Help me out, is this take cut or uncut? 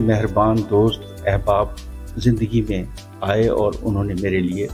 uncut